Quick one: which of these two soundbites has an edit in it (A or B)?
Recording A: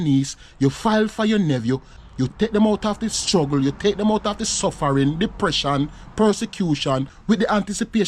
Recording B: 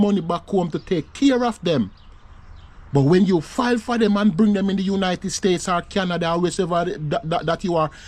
A